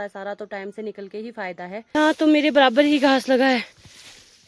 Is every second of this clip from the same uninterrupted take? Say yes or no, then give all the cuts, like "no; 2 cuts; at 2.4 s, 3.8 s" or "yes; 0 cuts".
no; 1 cut; at 1.9 s